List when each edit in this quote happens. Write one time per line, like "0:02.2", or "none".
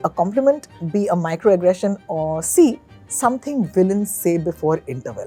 none